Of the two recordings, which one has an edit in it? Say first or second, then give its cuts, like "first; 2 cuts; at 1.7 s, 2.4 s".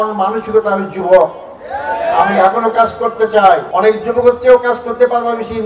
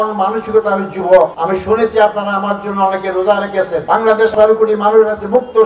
second; 2 cuts; at 1.4 s, 3.8 s